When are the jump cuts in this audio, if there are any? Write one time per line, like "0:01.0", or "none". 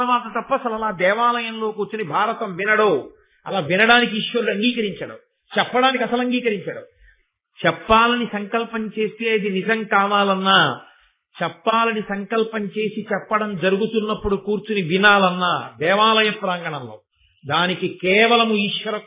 none